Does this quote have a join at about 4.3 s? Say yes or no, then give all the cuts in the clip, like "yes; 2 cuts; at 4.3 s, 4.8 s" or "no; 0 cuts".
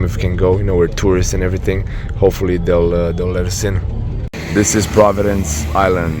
yes; 1 cut; at 4.3 s